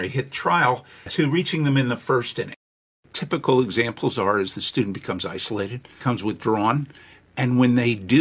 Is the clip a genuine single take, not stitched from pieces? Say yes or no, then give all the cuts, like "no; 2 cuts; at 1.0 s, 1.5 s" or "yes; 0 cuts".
no; 3 cuts; at 1.1 s, 2.7 s, 5.9 s